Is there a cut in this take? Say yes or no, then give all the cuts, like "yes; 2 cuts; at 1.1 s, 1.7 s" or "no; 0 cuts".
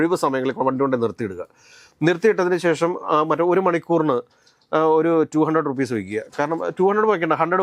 no; 0 cuts